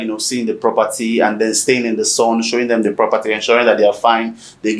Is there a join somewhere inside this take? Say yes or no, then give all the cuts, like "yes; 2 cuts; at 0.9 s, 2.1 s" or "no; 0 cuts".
no; 0 cuts